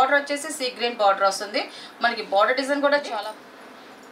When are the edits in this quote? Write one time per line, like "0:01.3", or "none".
0:03.1